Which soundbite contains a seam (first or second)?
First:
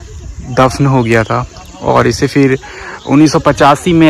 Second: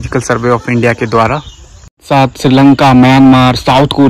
second